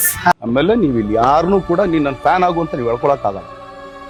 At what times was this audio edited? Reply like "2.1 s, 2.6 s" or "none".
none